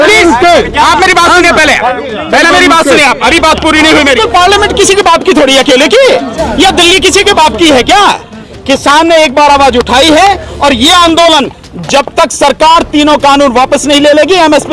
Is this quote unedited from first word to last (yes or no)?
no